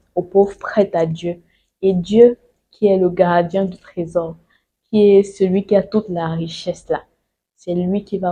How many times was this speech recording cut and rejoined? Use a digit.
0